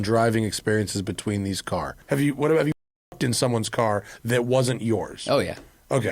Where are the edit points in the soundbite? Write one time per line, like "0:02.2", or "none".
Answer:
0:01.9